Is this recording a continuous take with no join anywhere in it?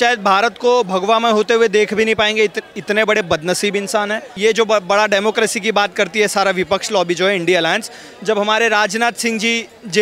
no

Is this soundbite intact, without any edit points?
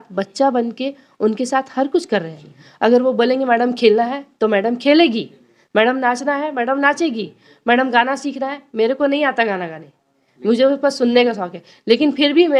yes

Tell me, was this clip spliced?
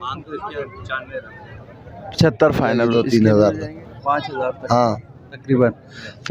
yes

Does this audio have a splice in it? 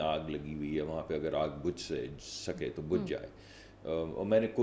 no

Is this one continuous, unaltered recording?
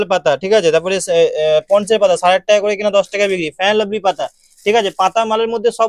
yes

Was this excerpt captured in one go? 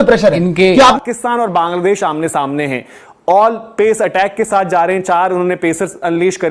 no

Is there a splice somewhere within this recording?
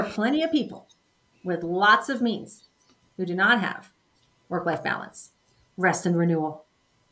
no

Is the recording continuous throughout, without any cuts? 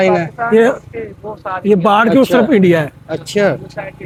yes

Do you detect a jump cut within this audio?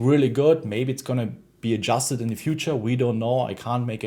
no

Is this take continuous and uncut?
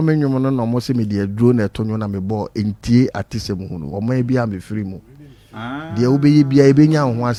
yes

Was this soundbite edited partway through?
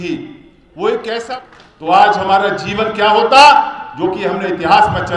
yes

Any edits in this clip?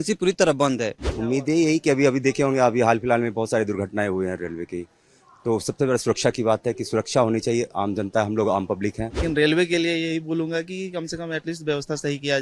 yes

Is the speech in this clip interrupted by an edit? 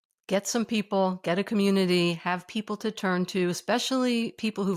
no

